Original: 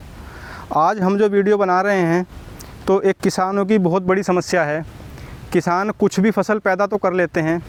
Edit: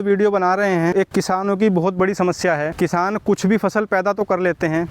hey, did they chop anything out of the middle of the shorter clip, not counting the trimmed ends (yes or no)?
yes